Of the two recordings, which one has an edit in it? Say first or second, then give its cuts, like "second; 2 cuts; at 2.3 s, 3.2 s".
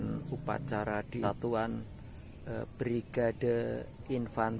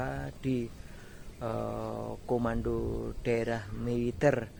first; 1 cut; at 1.2 s